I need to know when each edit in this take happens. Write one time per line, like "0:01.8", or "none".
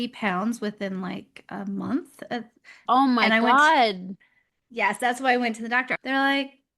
0:02.8
0:05.9